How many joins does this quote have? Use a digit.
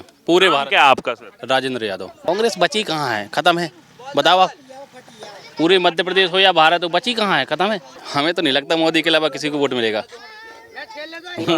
2